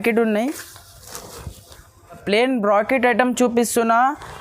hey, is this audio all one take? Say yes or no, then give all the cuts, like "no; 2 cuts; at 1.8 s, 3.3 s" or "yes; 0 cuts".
no; 1 cut; at 2.2 s